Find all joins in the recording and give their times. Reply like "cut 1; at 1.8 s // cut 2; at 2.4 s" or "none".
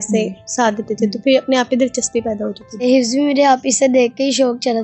cut 1; at 2.8 s